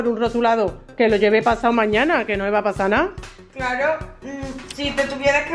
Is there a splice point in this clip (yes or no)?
no